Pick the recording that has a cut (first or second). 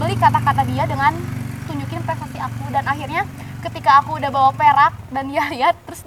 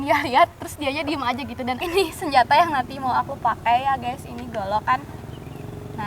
second